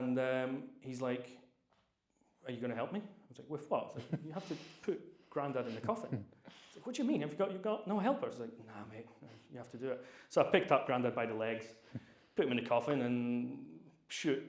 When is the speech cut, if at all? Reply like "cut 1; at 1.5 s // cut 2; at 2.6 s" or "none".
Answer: none